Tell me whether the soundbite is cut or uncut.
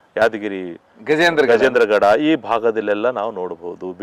uncut